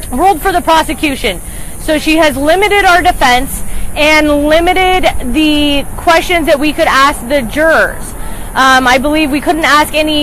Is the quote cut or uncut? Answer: cut